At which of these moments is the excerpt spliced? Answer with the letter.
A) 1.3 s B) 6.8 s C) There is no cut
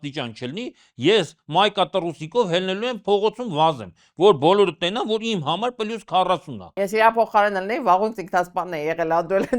B